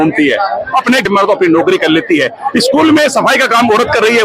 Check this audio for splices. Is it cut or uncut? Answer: cut